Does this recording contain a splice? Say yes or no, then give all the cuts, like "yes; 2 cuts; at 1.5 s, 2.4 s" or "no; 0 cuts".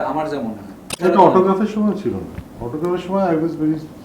yes; 1 cut; at 0.9 s